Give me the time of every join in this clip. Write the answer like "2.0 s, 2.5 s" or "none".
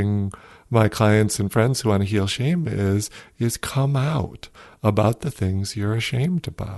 none